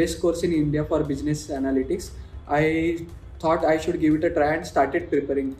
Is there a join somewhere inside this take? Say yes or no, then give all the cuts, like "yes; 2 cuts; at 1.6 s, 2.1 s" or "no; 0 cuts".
no; 0 cuts